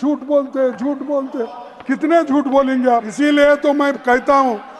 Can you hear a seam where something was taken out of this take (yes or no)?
yes